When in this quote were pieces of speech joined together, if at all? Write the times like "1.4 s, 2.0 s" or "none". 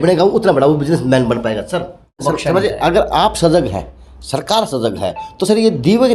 2.1 s